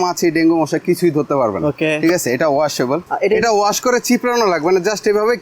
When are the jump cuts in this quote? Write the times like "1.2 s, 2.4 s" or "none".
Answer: 3.0 s